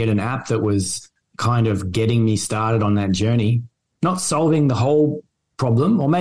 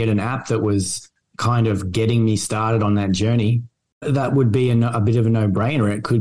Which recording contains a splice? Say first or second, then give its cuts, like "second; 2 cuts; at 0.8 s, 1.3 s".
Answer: second; 1 cut; at 3.8 s